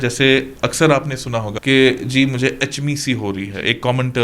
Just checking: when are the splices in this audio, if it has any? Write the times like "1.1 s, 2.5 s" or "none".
1.5 s